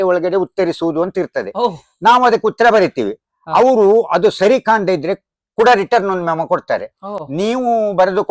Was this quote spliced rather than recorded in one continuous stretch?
no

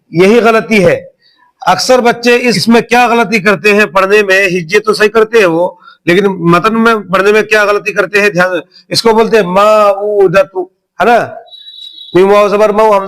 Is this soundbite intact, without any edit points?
no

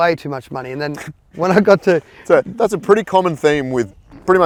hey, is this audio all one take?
yes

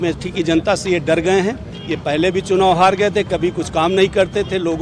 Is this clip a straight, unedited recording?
yes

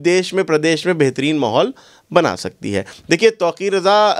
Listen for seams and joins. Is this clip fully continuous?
yes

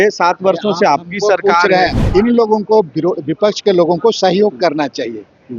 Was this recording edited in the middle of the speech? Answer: yes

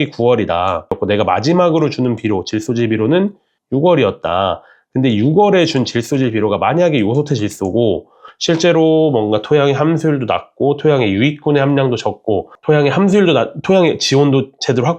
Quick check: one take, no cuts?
no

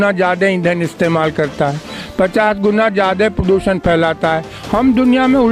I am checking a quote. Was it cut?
no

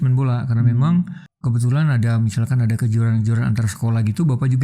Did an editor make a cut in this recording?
yes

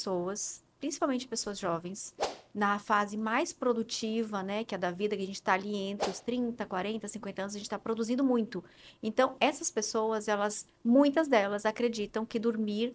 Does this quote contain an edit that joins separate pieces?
no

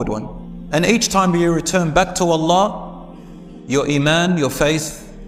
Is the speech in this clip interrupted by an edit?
no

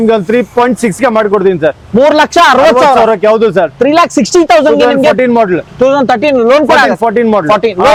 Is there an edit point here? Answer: no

